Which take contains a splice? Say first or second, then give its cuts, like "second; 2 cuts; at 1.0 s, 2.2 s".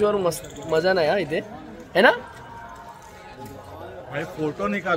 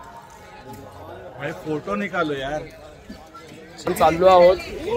second; 1 cut; at 3.9 s